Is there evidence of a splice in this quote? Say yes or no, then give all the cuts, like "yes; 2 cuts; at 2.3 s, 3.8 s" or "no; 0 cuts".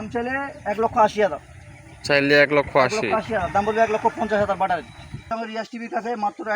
yes; 1 cut; at 5.3 s